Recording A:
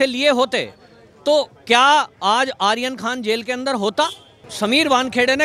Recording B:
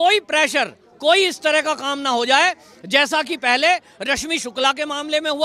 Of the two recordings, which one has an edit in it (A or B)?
A